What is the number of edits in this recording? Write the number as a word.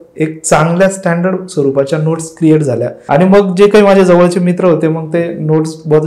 one